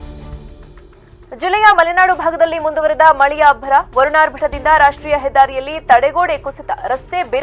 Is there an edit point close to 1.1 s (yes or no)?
yes